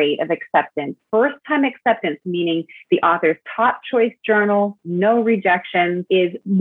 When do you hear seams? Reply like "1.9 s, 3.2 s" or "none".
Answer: none